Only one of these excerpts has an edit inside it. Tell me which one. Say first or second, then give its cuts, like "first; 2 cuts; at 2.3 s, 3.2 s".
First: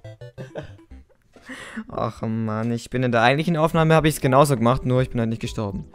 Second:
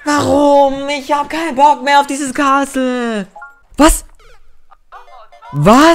second; 1 cut; at 3.3 s